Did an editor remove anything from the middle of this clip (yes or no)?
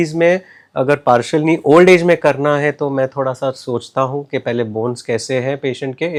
no